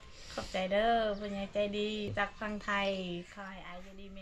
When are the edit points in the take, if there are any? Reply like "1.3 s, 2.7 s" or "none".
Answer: 2.1 s